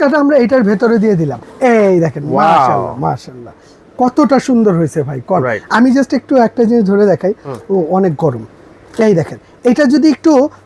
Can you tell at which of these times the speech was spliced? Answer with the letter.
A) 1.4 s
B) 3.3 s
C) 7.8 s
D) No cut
A